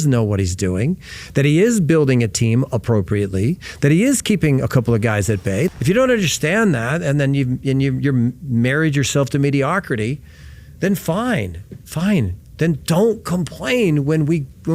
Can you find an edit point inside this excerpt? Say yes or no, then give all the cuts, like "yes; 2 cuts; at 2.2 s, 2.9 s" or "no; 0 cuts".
yes; 1 cut; at 5.7 s